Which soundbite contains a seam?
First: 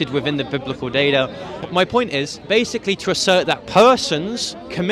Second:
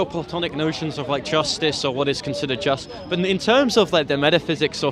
first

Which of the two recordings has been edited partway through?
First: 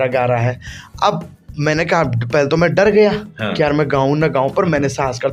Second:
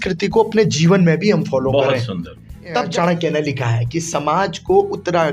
second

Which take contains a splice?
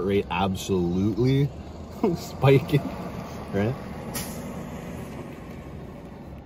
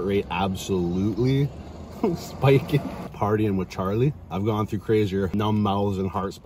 second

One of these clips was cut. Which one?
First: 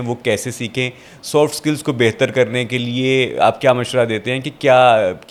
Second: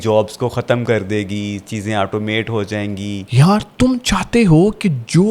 second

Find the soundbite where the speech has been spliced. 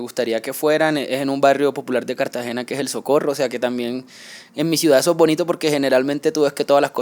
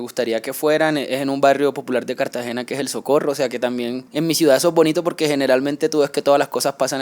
second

